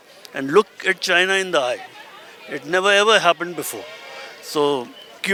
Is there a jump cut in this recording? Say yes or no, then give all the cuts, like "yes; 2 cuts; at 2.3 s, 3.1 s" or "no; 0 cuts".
no; 0 cuts